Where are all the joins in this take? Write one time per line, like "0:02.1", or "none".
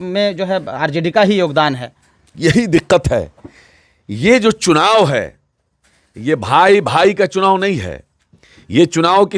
none